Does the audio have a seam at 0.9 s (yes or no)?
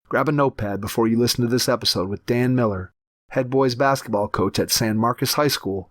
no